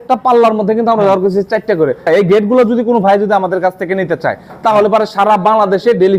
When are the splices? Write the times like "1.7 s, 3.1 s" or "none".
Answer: 2.1 s